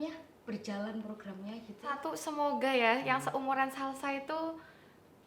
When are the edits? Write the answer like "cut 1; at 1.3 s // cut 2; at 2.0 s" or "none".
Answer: cut 1; at 1.9 s